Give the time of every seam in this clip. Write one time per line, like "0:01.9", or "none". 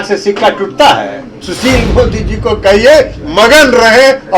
0:01.4